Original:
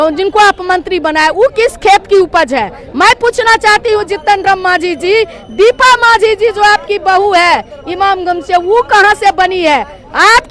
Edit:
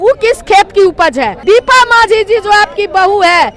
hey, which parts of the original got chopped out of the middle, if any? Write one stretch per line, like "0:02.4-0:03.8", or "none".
0:02.7-0:05.5